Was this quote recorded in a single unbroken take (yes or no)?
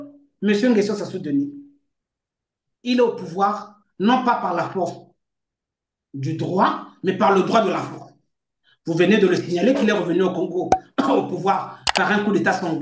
yes